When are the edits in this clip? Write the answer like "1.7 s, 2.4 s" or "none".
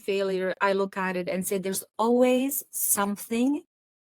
none